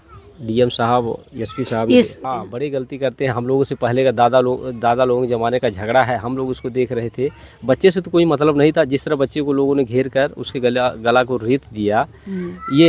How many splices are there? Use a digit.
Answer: 1